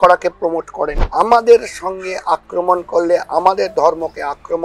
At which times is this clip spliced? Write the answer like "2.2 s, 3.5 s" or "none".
1.0 s